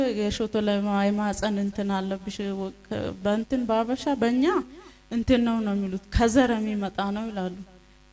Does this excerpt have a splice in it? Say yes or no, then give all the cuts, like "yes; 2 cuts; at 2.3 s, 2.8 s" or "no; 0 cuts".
no; 0 cuts